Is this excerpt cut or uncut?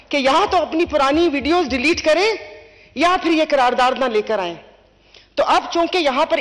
uncut